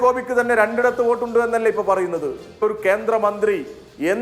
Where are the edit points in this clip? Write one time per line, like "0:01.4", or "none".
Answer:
0:02.6

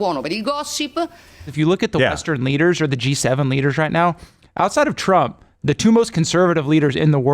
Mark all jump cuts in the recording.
0:01.5

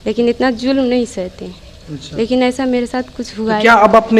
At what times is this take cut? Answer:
none

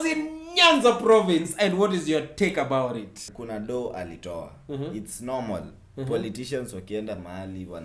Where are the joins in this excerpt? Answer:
0:03.3

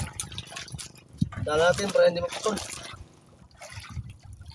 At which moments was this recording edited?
none

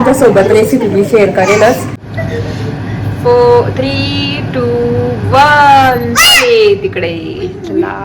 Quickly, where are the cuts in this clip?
0:02.2

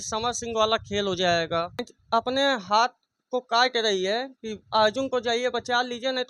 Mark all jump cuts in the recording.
0:01.9

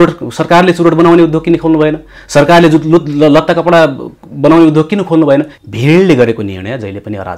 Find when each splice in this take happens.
0:05.5

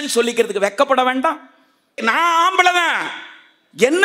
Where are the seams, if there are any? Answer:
0:02.0

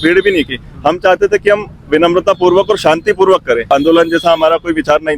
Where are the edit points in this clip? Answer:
0:03.6

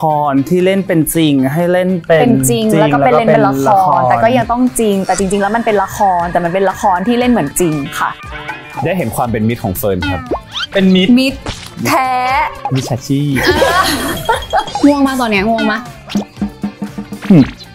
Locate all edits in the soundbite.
0:08.7
0:14.7

